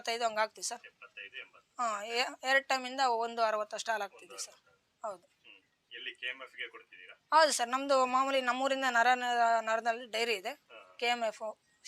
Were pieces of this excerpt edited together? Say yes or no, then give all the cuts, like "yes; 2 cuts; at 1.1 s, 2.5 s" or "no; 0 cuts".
no; 0 cuts